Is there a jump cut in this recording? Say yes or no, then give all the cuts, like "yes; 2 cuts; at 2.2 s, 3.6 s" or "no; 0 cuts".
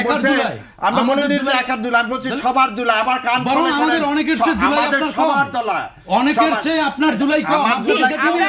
no; 0 cuts